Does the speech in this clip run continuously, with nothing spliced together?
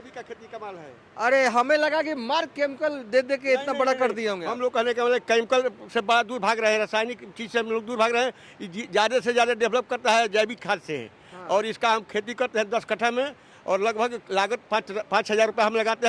yes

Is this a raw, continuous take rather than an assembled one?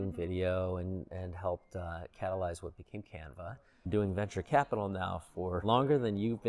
no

